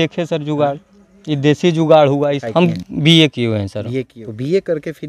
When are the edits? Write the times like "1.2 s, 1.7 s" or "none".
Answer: 2.4 s, 4.2 s

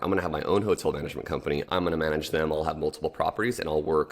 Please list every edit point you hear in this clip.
1.6 s

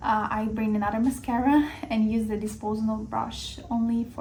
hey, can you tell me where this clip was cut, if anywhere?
none

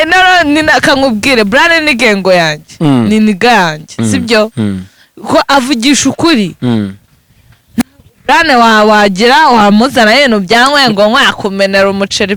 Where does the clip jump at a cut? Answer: none

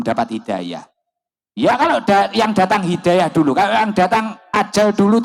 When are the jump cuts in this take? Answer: none

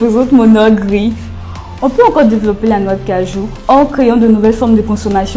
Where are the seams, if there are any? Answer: 3.5 s

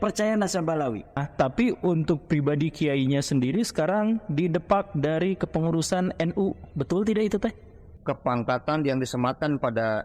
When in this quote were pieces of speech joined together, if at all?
1.1 s, 7.9 s

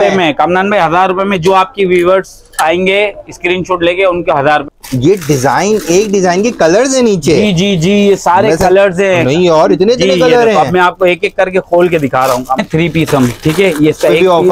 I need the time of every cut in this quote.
4.7 s, 12.5 s

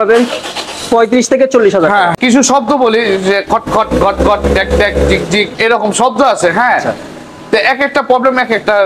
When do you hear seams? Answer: 2.1 s

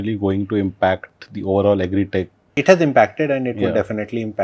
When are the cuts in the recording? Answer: 2.4 s

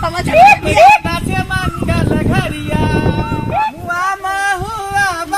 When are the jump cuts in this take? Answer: 3.8 s

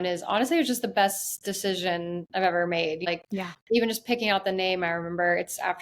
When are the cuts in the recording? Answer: 3.1 s

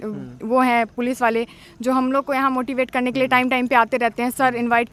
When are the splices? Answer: none

